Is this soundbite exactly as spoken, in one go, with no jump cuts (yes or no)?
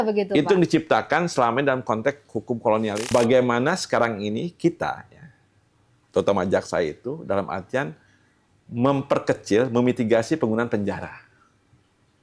no